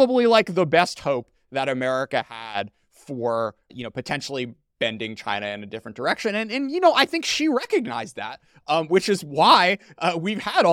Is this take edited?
yes; 1 cut; at 3.7 s

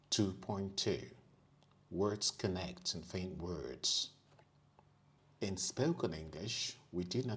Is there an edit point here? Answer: yes; 1 cut; at 5.2 s

